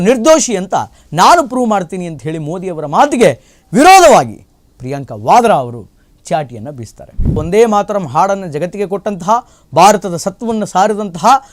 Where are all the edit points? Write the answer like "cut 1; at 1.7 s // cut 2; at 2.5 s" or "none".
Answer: cut 1; at 7.4 s